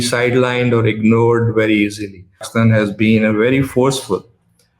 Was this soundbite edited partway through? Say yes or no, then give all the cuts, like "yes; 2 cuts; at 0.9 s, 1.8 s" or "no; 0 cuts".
yes; 1 cut; at 2.4 s